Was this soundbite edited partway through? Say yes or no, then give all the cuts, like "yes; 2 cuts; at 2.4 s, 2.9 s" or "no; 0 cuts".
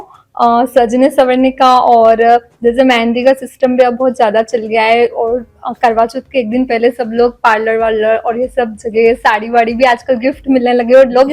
no; 0 cuts